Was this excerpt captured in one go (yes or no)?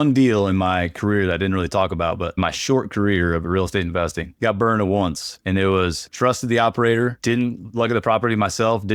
yes